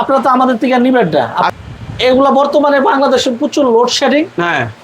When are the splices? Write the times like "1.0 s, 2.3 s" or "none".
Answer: 1.5 s